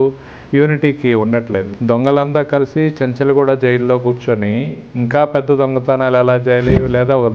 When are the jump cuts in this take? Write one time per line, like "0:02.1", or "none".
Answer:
0:01.7